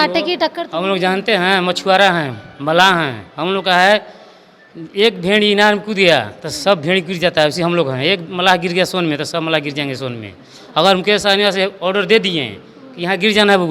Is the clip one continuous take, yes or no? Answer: yes